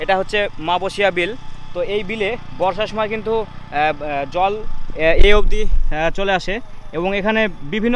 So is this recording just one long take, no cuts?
yes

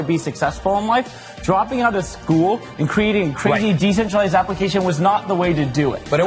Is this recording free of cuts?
yes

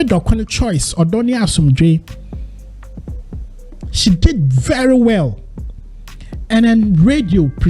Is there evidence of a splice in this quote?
yes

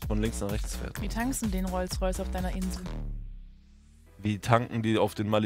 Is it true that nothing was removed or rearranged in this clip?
yes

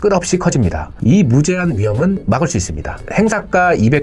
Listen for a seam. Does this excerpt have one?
yes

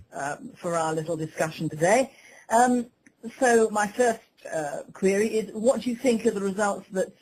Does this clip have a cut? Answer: yes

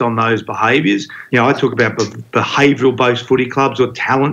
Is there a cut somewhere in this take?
yes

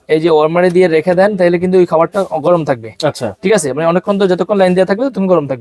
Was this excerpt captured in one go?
yes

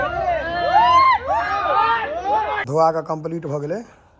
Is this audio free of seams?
no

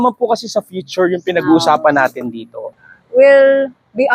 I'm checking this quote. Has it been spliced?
yes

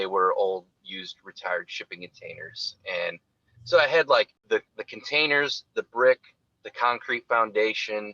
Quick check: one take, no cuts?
no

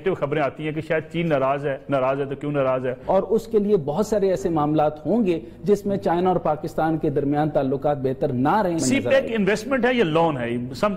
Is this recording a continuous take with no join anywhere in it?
no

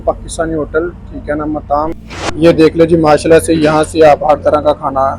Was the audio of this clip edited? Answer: yes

